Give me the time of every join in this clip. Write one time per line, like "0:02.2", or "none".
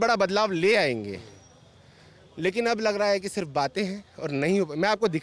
none